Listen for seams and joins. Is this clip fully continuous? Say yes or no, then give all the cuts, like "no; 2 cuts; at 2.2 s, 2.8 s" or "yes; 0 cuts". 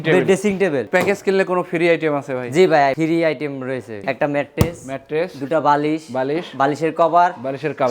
no; 3 cuts; at 0.9 s, 3.0 s, 4.0 s